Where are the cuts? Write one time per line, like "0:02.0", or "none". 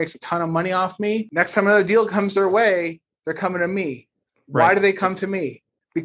0:01.3